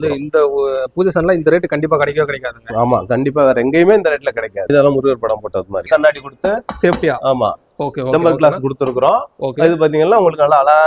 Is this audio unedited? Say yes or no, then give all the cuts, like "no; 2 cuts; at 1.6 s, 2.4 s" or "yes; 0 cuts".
no; 2 cuts; at 4.7 s, 5.9 s